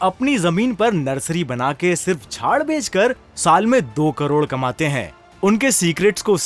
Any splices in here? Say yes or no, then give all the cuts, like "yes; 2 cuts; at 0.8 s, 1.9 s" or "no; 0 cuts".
no; 0 cuts